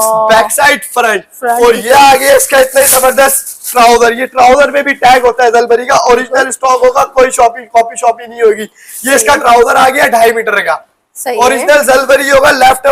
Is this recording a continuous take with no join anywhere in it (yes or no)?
yes